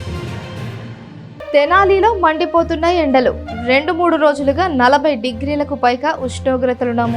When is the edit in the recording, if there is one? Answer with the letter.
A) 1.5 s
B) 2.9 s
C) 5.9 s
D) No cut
D